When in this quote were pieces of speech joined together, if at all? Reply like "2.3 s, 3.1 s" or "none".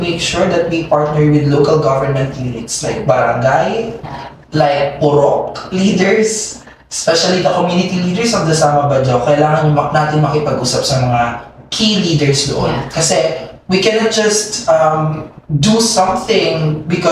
none